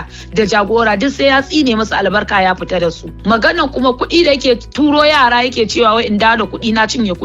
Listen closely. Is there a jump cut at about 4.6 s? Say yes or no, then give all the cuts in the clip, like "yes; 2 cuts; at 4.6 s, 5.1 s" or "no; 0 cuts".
no; 1 cut; at 3.1 s